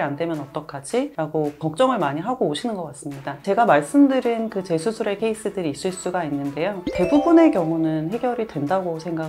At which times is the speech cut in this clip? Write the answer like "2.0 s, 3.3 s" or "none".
5.2 s

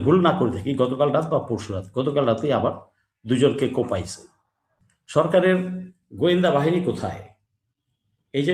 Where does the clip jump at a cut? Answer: 4.7 s

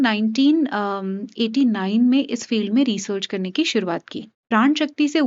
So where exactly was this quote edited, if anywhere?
4.3 s

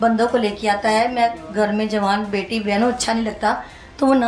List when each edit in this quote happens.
none

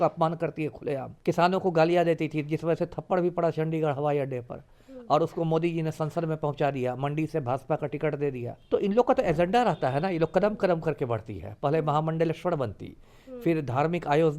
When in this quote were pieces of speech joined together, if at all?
1.1 s, 8.5 s

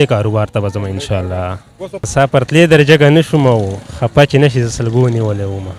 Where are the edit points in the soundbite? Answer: 2.0 s

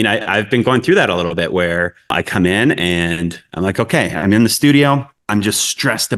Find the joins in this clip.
none

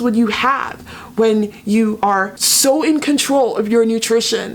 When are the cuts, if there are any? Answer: 2.1 s

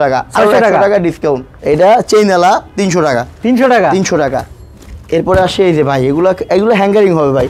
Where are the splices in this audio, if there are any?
1.5 s

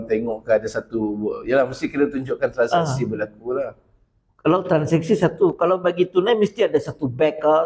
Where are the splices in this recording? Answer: none

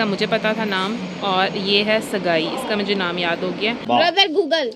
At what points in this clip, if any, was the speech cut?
3.8 s

